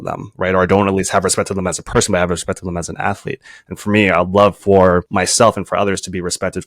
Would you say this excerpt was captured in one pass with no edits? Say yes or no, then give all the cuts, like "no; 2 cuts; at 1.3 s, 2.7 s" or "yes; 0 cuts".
no; 1 cut; at 5.1 s